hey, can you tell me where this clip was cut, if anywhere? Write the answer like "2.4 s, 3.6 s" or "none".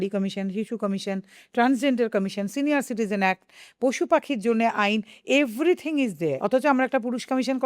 6.4 s